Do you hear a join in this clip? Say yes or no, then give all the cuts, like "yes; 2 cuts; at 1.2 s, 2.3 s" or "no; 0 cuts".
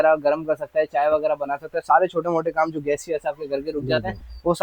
no; 0 cuts